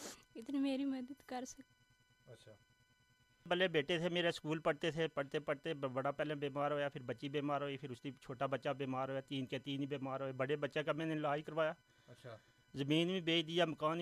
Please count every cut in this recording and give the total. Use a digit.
1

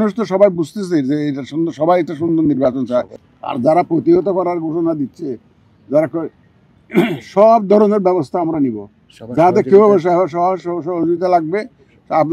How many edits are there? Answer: 1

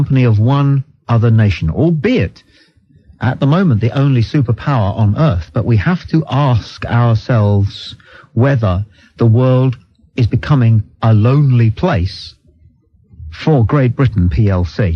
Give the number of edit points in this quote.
0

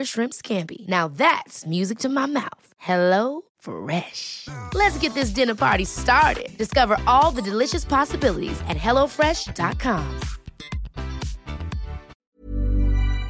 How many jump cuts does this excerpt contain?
1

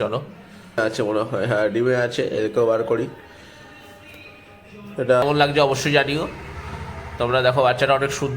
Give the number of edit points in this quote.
2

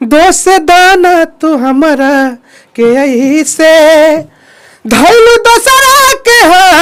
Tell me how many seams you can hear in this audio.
0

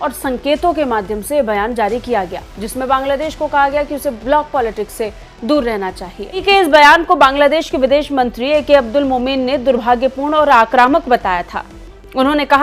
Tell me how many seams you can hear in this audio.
1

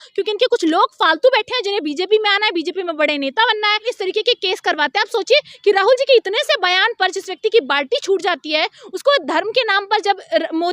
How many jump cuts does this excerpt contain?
1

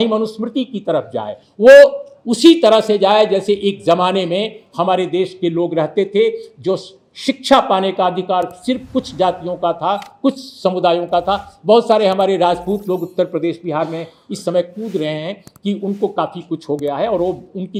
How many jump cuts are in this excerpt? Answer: 0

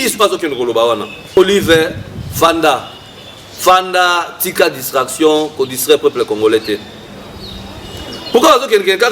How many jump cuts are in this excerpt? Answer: 1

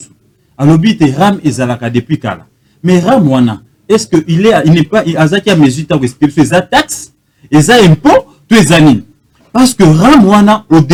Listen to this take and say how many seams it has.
0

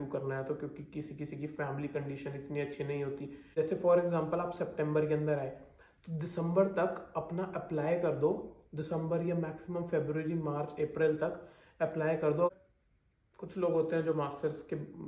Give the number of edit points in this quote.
2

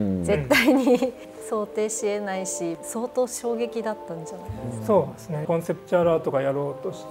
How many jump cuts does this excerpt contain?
3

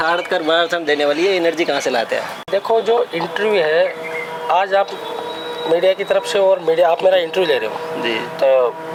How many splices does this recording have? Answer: 0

